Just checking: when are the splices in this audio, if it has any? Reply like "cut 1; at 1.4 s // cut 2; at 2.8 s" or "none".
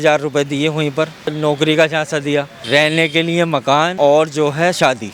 cut 1; at 1.3 s // cut 2; at 2.6 s // cut 3; at 3.9 s